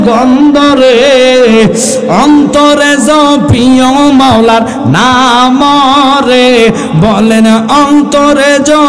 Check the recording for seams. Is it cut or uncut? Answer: uncut